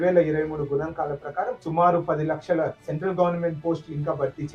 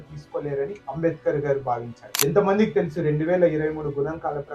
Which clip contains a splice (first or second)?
second